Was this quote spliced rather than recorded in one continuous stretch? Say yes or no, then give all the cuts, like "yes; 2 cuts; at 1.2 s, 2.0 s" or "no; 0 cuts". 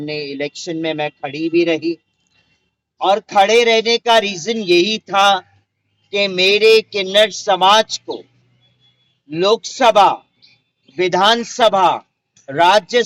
no; 0 cuts